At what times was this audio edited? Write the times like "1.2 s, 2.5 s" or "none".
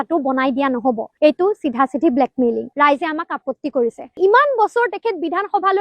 4.2 s